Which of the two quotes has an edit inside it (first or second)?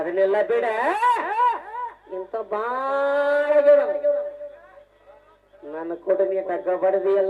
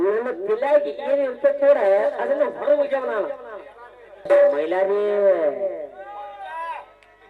second